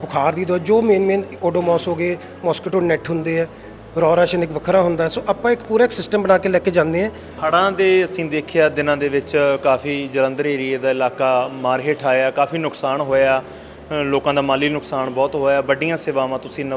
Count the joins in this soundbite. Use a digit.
1